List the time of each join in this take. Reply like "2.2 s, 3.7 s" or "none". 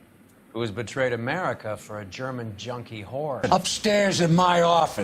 3.4 s